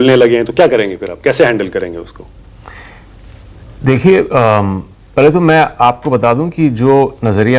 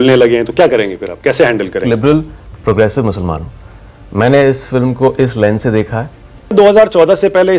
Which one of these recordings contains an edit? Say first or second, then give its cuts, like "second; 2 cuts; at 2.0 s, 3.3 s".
second; 2 cuts; at 1.8 s, 6.5 s